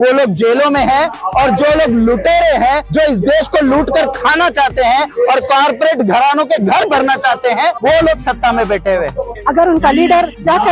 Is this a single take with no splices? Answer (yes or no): no